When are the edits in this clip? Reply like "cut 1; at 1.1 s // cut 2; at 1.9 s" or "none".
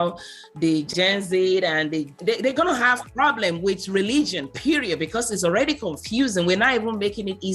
cut 1; at 0.9 s // cut 2; at 2.1 s